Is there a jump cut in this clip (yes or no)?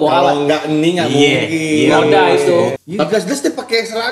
yes